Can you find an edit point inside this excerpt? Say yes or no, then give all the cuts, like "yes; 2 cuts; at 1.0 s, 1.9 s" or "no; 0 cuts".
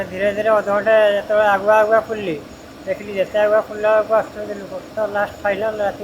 yes; 1 cut; at 4.9 s